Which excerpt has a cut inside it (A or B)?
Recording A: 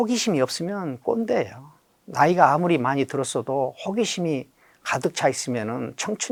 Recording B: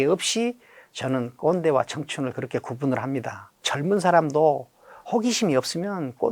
B